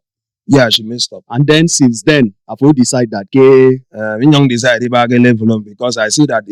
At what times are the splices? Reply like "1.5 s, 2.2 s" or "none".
none